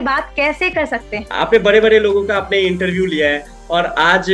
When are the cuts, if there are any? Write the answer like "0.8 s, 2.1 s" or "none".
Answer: 1.3 s